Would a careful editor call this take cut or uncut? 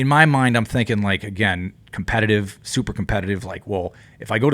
uncut